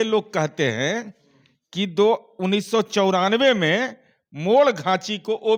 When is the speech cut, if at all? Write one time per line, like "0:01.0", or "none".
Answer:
none